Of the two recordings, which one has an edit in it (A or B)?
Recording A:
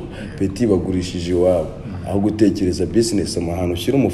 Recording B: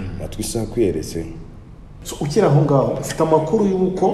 B